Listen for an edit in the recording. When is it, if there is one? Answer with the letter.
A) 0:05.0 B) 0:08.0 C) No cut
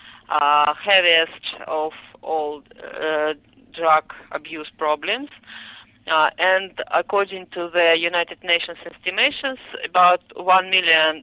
A